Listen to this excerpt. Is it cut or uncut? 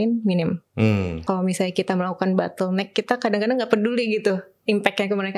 cut